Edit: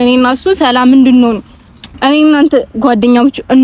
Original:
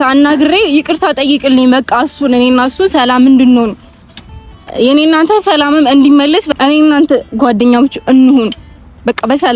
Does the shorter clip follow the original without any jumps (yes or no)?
no